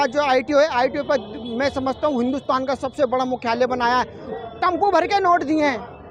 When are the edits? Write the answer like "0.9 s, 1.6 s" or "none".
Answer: 4.2 s